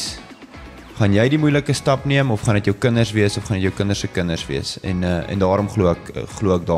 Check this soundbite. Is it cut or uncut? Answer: uncut